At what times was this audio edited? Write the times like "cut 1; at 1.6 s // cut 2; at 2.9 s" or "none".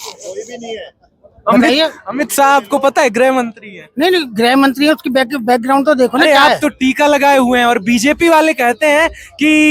cut 1; at 6.2 s